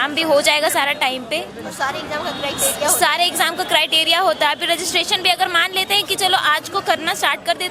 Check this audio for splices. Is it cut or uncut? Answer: uncut